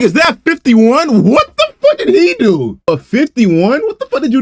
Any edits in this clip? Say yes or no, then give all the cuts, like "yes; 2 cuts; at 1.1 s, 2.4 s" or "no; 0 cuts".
yes; 1 cut; at 2.9 s